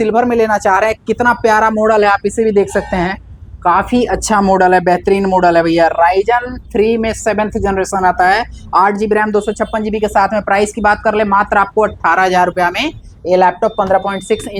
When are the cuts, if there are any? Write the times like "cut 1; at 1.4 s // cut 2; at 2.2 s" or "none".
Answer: none